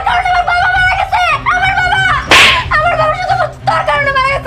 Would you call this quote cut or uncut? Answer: uncut